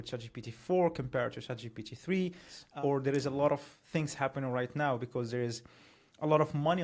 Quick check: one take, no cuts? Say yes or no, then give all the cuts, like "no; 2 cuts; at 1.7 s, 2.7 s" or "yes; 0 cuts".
no; 1 cut; at 2.6 s